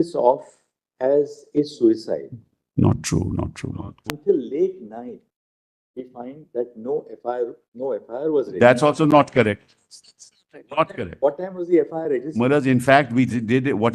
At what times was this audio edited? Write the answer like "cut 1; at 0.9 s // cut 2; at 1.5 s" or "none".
cut 1; at 4.0 s

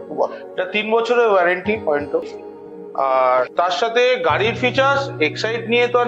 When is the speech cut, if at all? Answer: cut 1; at 2.3 s

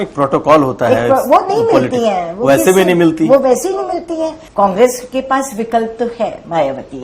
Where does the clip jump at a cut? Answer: cut 1; at 4.4 s

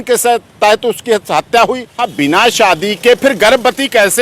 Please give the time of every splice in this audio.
cut 1; at 1.9 s

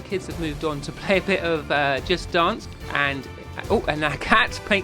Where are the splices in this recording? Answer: cut 1; at 2.7 s

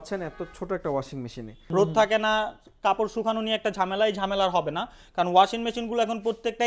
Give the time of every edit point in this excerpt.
cut 1; at 1.5 s

